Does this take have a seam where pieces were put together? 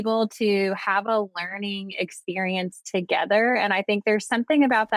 no; 0 cuts

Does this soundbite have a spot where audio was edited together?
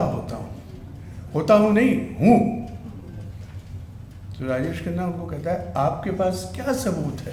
no; 0 cuts

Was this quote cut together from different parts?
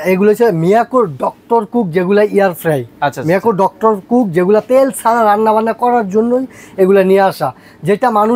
no; 0 cuts

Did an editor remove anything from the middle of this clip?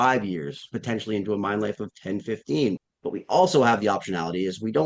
yes; 1 cut; at 2.9 s

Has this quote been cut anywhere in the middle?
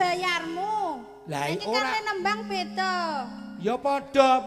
no; 0 cuts

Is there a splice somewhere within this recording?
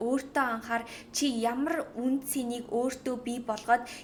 no; 0 cuts

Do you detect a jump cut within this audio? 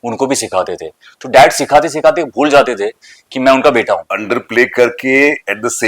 yes; 1 cut; at 4.1 s

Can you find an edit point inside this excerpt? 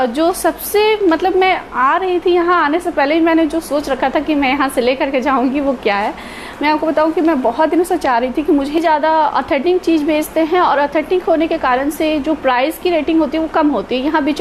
yes; 1 cut; at 8.8 s

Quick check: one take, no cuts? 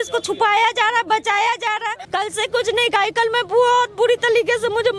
no; 1 cut; at 2.1 s

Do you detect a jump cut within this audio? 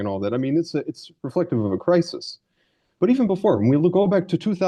no; 0 cuts

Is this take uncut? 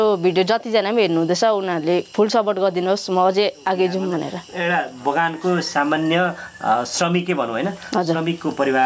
no; 1 cut; at 4.4 s

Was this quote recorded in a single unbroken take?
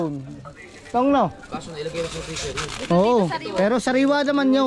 yes; 0 cuts

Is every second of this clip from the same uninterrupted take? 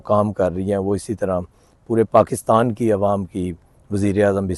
yes; 0 cuts

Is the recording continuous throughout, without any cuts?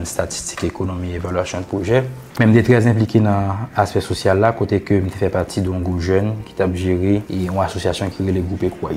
no; 2 cuts; at 2.2 s, 7.3 s

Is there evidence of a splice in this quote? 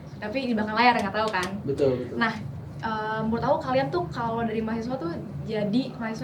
no; 0 cuts

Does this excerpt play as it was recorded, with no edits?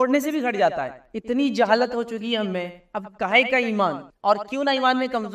no; 1 cut; at 1.0 s

